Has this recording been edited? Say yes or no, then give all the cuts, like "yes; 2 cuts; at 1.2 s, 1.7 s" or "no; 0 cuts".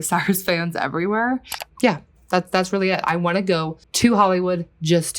yes; 2 cuts; at 1.6 s, 3.8 s